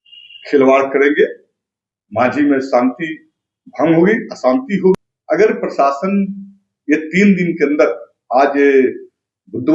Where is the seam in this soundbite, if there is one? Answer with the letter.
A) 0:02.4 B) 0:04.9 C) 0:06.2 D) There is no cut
B